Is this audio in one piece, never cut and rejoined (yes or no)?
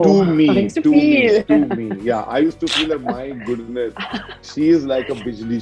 yes